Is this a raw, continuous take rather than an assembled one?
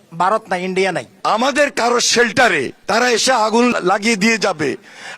no; 3 cuts; at 1.1 s, 2.8 s, 3.7 s

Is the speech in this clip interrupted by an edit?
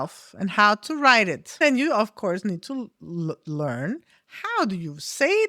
yes; 1 cut; at 1.6 s

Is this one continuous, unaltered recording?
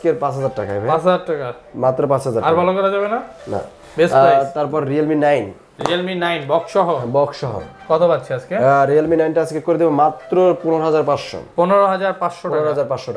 yes; 0 cuts

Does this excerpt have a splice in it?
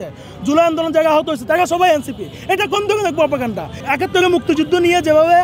yes; 1 cut; at 3.7 s

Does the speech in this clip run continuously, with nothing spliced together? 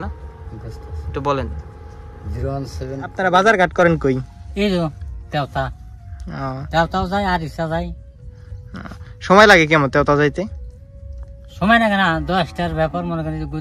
no; 1 cut; at 3.0 s

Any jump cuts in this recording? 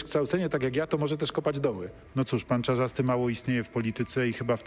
yes; 1 cut; at 1.9 s

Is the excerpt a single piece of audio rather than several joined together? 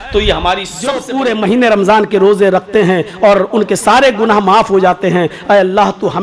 no; 1 cut; at 1.0 s

